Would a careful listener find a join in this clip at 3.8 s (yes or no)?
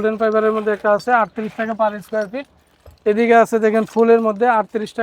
no